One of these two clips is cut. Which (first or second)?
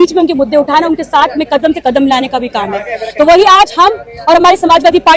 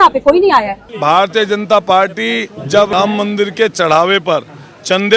second